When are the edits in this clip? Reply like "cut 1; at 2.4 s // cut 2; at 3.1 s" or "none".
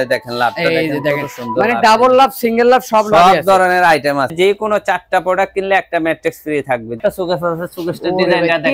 cut 1; at 4.3 s // cut 2; at 7.0 s